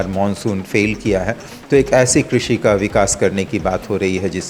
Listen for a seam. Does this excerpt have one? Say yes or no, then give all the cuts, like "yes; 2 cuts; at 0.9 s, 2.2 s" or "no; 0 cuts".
no; 0 cuts